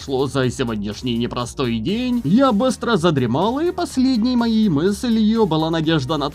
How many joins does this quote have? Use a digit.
1